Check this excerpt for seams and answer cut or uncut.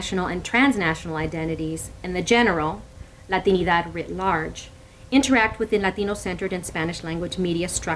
uncut